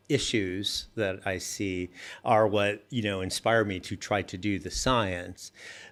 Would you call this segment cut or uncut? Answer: uncut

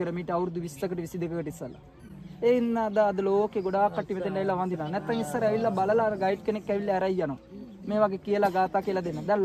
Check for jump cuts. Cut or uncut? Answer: uncut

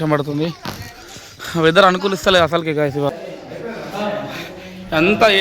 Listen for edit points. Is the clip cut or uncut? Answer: cut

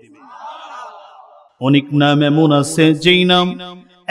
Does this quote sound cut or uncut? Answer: cut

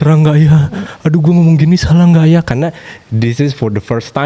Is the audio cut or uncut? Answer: uncut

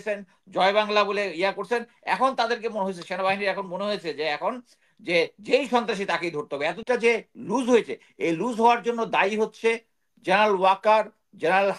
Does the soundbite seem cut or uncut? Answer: cut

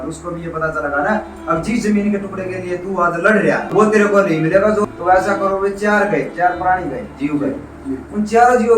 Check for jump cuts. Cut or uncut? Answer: cut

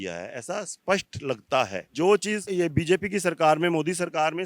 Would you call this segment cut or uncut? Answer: cut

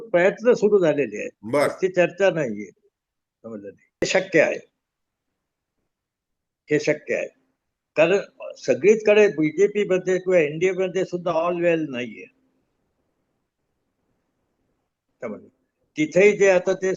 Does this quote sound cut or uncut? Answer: cut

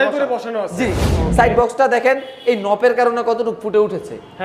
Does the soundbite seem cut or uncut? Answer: cut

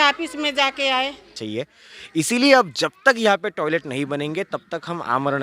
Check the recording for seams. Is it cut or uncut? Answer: cut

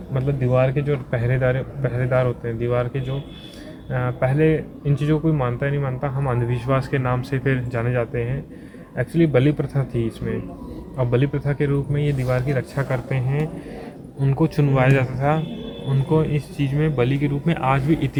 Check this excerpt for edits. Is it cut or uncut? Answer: uncut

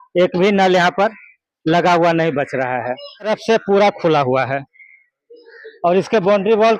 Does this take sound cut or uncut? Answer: cut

